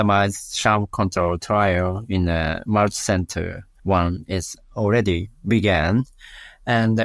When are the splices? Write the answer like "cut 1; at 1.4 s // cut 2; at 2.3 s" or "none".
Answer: cut 1; at 3.6 s